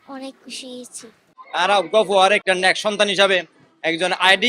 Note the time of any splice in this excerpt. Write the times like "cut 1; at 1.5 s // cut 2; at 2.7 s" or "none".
cut 1; at 1.4 s